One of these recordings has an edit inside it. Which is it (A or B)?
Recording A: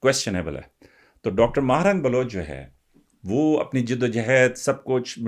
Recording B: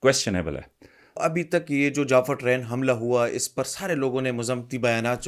B